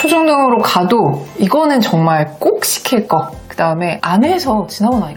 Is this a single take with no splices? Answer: yes; 0 cuts

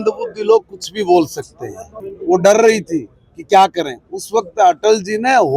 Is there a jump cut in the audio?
yes; 1 cut; at 1.9 s

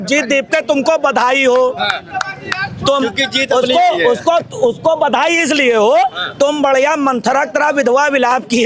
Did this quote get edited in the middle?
no; 0 cuts

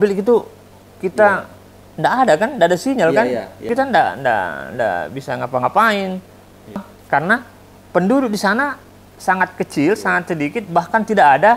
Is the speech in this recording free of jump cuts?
no; 2 cuts; at 3.7 s, 6.8 s

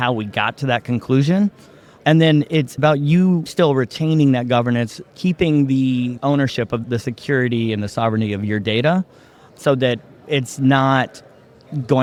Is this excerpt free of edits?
yes; 0 cuts

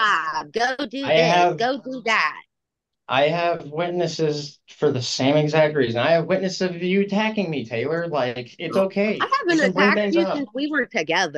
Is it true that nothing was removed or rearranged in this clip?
yes; 0 cuts

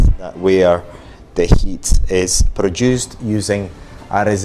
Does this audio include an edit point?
no; 0 cuts

